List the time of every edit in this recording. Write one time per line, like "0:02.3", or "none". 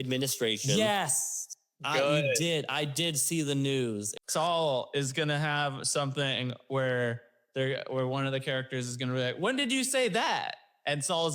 0:04.1